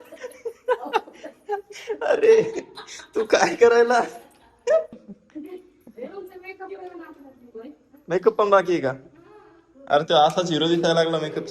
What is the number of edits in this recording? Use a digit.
1